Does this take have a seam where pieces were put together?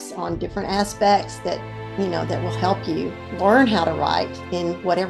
yes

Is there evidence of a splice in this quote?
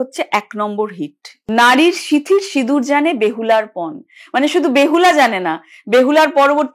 yes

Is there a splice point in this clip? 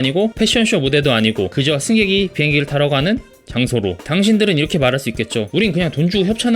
yes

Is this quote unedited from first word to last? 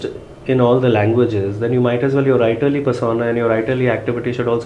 yes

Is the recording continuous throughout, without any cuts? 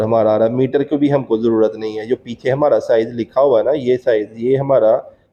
yes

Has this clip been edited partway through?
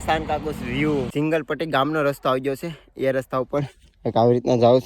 yes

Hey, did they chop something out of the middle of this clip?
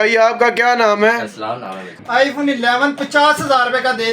yes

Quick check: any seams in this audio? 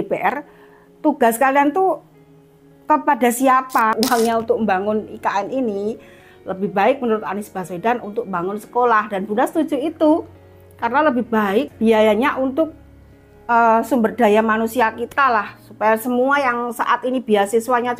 yes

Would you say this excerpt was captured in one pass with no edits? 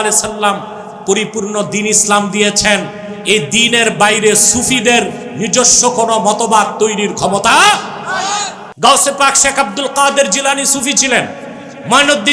no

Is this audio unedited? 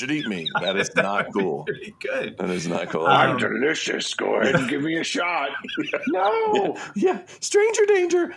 yes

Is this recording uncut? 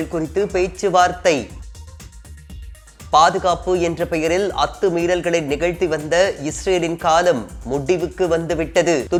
yes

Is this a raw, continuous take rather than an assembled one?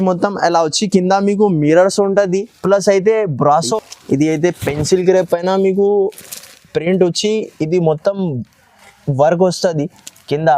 no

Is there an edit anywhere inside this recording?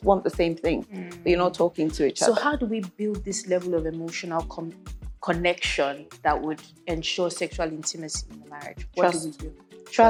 no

